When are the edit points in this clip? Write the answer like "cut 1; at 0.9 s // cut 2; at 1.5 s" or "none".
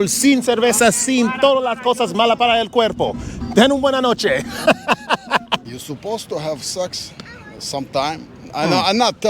cut 1; at 5.6 s